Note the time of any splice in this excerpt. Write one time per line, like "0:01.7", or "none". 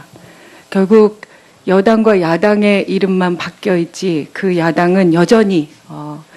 none